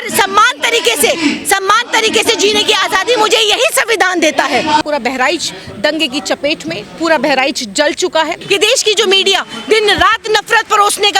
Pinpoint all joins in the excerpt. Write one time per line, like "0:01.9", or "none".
0:04.8
0:08.4